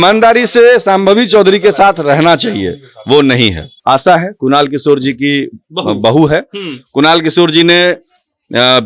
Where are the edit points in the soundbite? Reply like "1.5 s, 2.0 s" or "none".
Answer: 3.7 s